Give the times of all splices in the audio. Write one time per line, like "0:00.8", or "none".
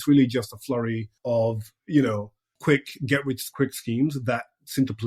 0:01.1
0:02.5
0:03.5